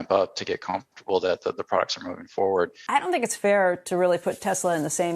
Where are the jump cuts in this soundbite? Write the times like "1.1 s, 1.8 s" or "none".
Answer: 2.8 s